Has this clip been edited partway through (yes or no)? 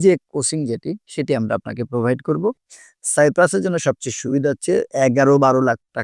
yes